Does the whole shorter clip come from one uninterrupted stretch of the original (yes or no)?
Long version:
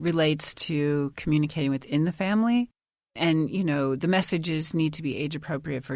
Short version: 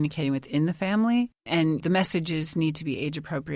no